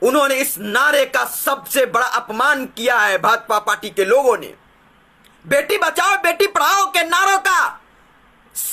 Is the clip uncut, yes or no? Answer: yes